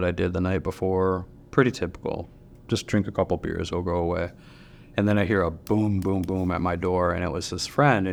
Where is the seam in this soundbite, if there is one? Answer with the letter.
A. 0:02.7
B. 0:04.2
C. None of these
C